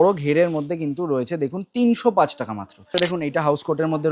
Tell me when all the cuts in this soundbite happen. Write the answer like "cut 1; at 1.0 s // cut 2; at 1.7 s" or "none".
cut 1; at 2.9 s